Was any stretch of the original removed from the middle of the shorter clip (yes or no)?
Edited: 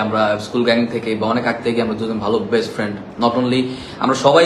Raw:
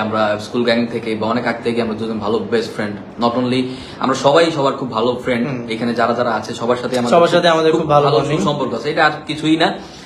no